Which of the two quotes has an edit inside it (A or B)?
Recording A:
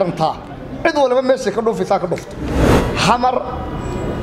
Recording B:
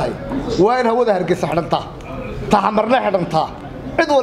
A